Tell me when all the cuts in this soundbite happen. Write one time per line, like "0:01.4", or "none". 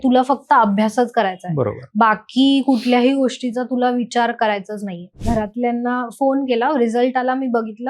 0:05.2